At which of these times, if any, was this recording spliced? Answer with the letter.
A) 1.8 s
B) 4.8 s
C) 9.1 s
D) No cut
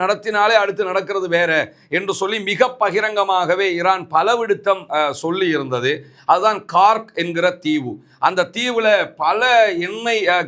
D